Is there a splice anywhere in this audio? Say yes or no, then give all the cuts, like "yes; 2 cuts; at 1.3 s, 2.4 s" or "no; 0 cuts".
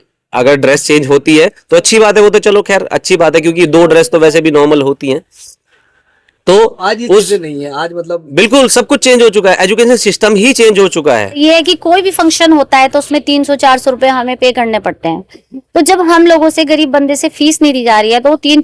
yes; 1 cut; at 11.4 s